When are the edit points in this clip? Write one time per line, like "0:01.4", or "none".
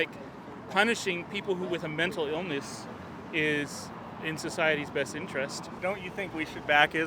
0:05.7